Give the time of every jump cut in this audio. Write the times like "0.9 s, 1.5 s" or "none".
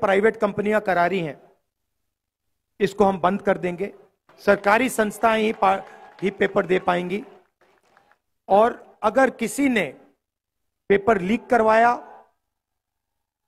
none